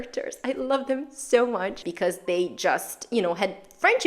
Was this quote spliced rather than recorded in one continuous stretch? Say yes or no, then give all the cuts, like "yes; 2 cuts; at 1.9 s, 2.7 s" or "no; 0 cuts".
yes; 1 cut; at 1.8 s